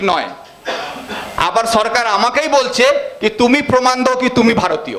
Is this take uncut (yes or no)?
yes